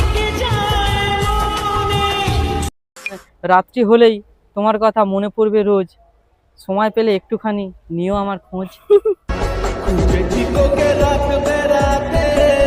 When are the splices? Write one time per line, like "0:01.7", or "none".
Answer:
0:03.3